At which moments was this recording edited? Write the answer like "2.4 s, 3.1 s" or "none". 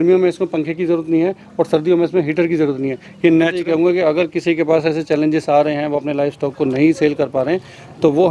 3.6 s